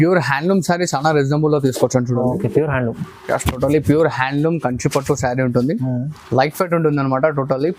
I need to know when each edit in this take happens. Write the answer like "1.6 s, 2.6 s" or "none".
none